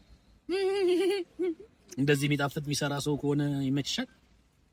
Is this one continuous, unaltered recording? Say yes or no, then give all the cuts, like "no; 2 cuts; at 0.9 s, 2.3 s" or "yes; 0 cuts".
yes; 0 cuts